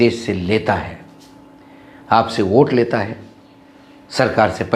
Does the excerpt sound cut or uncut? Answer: uncut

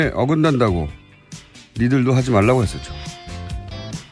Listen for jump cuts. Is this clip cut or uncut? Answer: cut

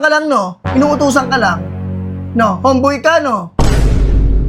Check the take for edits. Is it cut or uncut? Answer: uncut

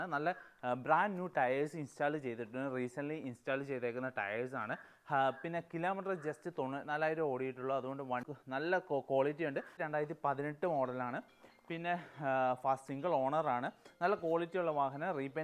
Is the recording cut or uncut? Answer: cut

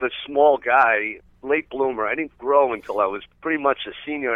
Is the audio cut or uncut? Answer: cut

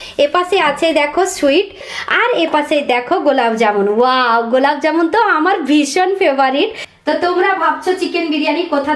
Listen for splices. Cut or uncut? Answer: cut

